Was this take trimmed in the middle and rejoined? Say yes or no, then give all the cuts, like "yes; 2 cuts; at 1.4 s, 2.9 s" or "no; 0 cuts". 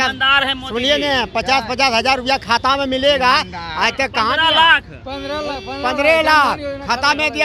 no; 0 cuts